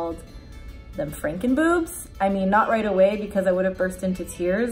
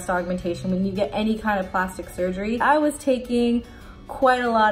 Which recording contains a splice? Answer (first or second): second